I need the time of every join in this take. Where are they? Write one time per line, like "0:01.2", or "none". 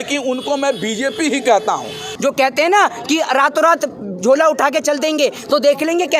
0:02.1